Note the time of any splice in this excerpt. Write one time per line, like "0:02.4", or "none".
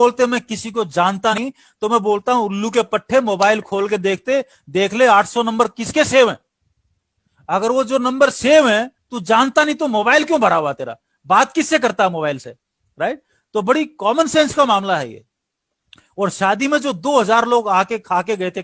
0:01.4